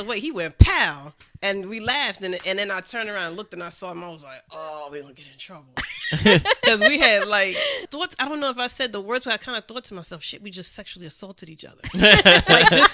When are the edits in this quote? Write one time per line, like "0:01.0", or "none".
0:07.8